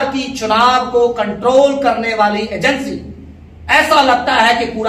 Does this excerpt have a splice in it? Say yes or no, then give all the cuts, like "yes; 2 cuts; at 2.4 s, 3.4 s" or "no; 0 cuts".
no; 0 cuts